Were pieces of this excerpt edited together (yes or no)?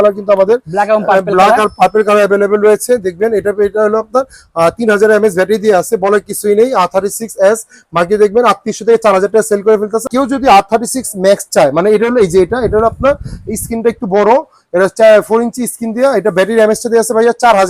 no